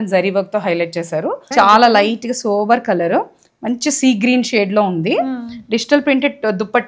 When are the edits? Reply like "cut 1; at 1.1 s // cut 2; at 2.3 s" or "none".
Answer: cut 1; at 1.4 s